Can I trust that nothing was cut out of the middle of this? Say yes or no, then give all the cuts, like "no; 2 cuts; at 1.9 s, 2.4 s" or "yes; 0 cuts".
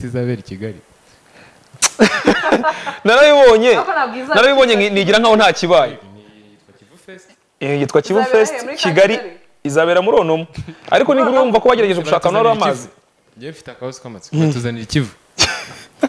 yes; 0 cuts